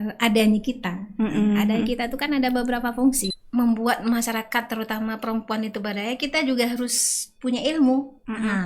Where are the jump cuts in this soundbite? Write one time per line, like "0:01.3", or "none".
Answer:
0:03.3